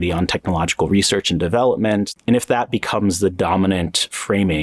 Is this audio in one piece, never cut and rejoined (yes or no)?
no